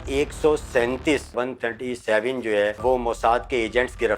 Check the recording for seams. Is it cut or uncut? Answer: cut